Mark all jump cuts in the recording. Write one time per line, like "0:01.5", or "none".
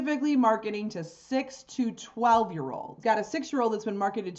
0:03.0